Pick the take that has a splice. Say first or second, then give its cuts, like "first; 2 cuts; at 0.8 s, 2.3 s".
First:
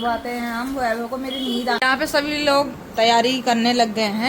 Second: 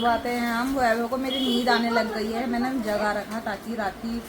first; 1 cut; at 1.8 s